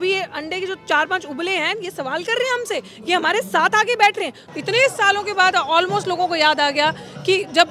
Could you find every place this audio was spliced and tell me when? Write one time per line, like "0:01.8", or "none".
0:04.4